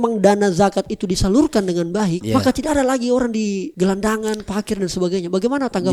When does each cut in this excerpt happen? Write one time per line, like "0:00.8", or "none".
none